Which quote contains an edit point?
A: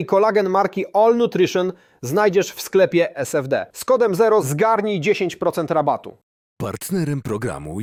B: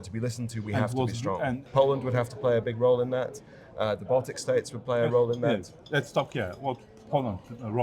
B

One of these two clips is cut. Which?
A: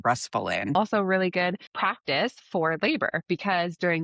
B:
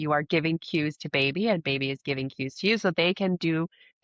A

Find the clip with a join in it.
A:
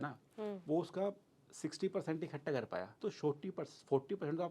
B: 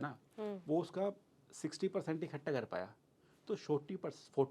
A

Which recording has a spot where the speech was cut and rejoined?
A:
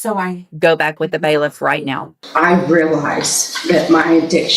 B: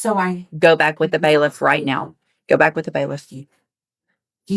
A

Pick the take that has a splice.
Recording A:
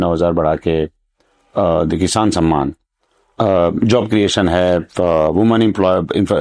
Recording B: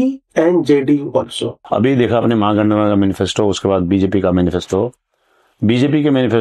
B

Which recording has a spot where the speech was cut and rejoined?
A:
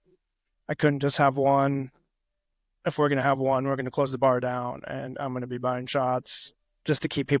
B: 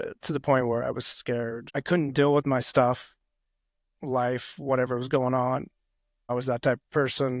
B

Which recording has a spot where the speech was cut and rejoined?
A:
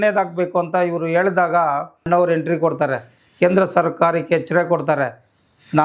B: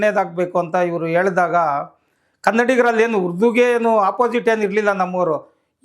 A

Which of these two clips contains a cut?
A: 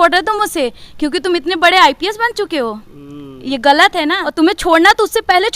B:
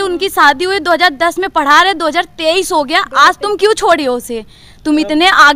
A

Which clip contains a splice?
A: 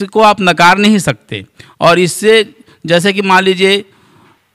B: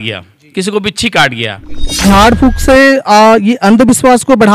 B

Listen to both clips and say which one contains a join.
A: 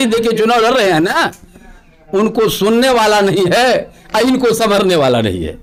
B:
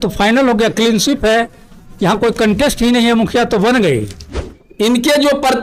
B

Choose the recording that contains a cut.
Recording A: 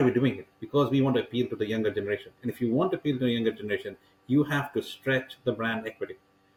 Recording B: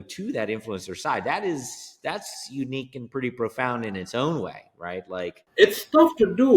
B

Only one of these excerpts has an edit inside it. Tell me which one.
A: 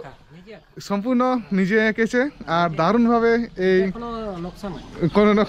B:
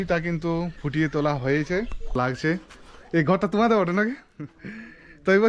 B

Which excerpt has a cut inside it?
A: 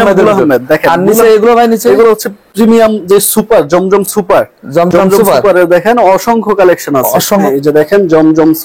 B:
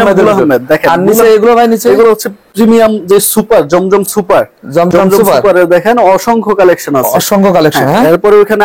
A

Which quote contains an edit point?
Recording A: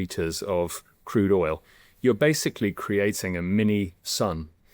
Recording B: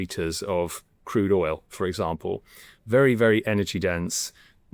A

